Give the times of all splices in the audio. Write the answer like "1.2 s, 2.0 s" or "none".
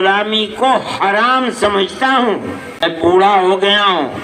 2.8 s